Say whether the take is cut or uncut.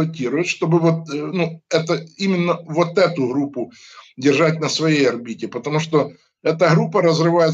uncut